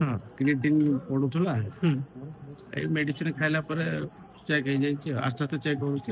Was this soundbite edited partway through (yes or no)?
no